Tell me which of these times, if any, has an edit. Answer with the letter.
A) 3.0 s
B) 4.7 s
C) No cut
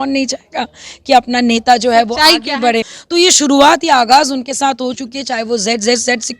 A